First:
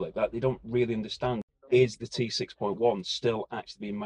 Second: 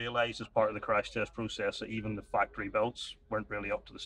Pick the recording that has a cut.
first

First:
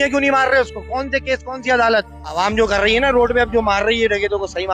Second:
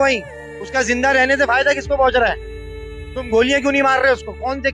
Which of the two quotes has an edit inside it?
first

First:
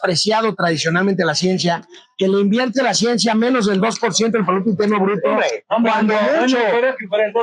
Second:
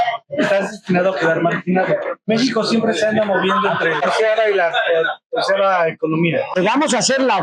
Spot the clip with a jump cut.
second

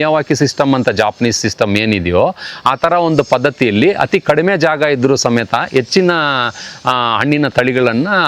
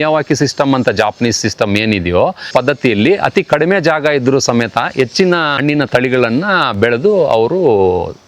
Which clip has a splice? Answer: second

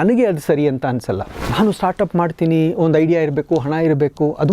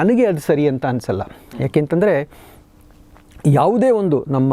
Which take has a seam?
first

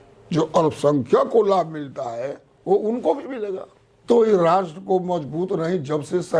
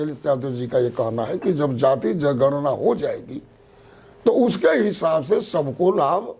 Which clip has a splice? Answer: first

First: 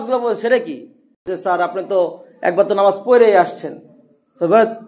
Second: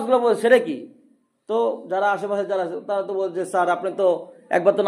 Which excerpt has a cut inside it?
first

